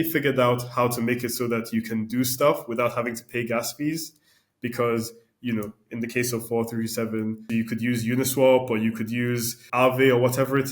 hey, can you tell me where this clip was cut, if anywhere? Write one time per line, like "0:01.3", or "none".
0:07.4
0:09.6